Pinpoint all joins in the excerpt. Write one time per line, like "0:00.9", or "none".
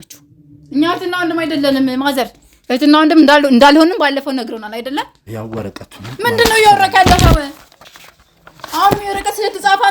0:05.2